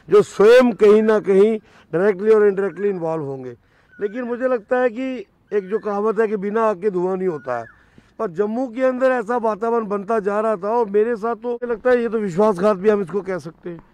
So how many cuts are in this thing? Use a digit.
1